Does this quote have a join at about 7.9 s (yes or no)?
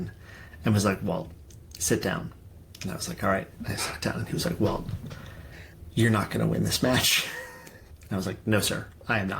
yes